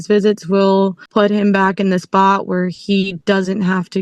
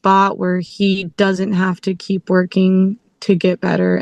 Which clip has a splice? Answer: first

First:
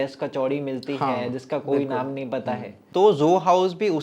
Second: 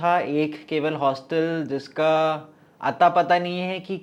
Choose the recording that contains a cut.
first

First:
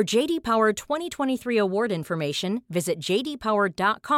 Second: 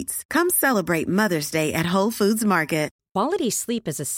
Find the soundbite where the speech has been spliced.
second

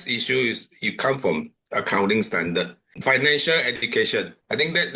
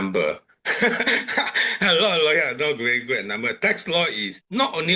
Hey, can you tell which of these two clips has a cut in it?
first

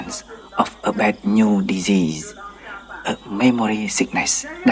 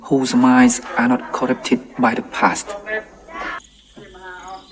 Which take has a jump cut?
second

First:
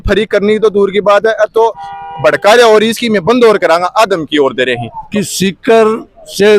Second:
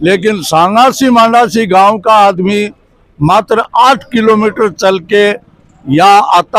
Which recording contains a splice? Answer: first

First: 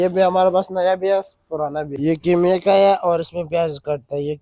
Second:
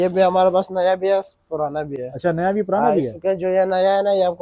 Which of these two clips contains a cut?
first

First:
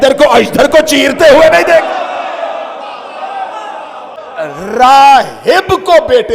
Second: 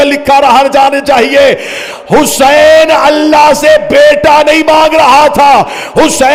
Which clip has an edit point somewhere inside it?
first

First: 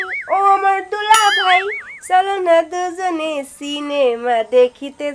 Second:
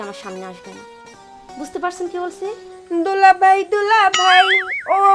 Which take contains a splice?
second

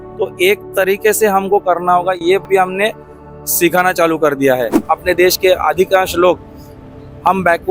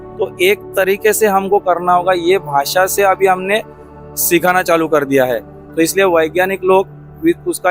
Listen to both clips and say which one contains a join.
first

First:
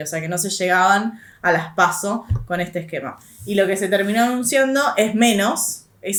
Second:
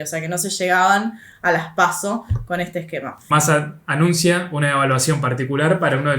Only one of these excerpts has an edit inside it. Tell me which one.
second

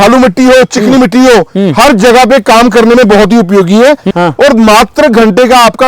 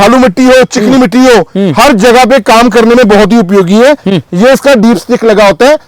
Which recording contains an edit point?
first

